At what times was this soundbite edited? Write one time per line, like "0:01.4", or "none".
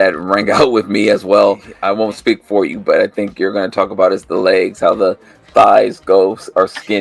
0:01.7